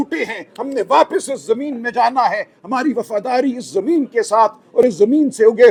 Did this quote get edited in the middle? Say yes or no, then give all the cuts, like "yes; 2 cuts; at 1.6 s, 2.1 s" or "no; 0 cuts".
no; 0 cuts